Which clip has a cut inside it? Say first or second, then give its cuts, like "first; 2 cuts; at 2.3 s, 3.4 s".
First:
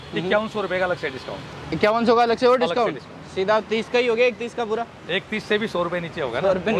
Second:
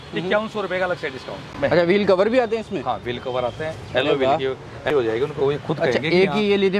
second; 2 cuts; at 1.5 s, 4.9 s